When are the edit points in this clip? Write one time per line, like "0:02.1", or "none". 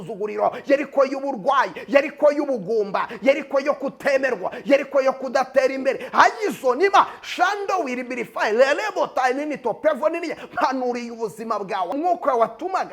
0:11.9